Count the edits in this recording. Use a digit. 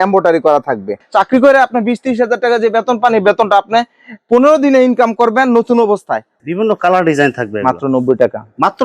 2